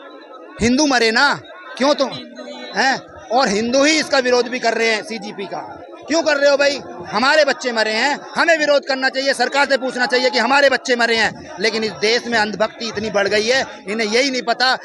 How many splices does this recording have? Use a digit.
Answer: 0